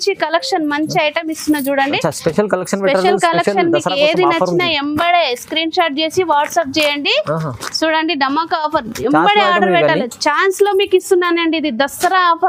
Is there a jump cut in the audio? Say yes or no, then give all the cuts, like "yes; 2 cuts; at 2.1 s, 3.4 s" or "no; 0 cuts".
no; 0 cuts